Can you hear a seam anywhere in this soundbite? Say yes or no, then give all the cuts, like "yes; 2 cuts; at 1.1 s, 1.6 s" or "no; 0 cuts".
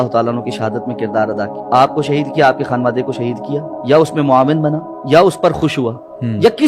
yes; 3 cuts; at 1.6 s, 3.7 s, 4.9 s